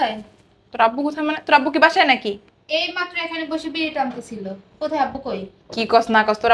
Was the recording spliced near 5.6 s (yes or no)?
no